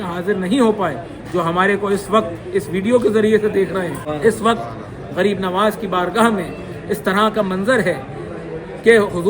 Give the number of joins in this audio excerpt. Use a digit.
1